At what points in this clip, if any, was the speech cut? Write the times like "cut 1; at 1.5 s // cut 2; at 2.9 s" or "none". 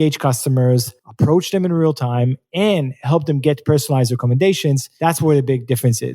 cut 1; at 1.0 s // cut 2; at 4.9 s